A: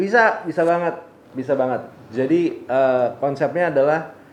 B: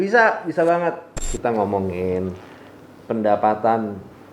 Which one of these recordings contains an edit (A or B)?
B